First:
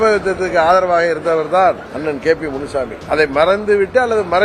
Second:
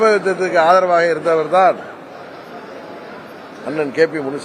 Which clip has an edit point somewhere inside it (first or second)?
first